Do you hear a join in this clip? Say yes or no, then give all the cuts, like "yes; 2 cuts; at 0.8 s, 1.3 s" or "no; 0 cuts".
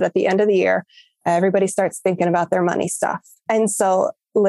yes; 1 cut; at 3.4 s